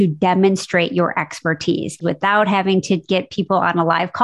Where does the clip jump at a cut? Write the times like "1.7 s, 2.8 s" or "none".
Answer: 2.0 s